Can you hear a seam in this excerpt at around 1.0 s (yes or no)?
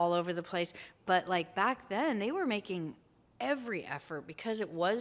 yes